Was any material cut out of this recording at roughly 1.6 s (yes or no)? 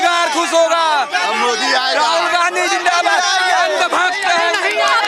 no